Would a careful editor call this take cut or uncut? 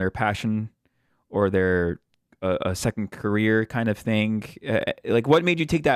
uncut